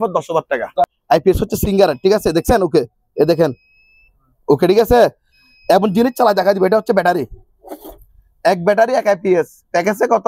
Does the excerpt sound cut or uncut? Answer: cut